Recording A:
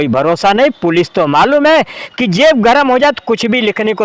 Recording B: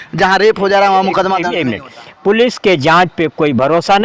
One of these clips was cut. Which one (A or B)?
B